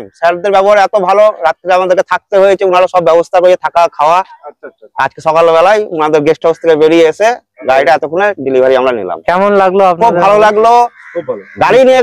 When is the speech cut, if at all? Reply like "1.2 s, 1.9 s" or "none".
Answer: none